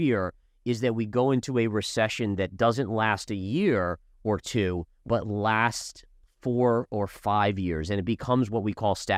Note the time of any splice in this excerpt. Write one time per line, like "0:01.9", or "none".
none